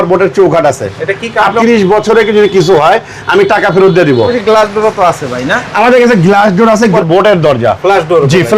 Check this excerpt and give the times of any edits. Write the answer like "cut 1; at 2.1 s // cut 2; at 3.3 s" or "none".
cut 1; at 1.6 s // cut 2; at 4.3 s // cut 3; at 7.0 s